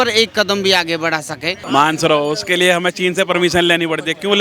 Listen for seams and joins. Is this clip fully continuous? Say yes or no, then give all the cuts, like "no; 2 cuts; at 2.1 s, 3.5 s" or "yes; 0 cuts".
no; 1 cut; at 1.6 s